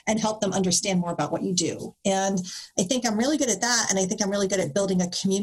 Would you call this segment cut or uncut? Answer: uncut